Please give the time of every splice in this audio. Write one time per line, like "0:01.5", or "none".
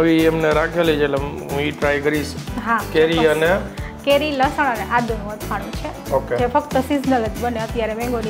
none